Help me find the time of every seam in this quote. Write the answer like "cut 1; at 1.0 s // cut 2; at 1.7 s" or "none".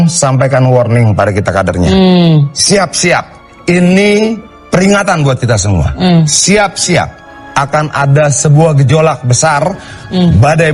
none